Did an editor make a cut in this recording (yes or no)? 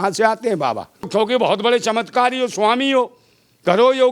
yes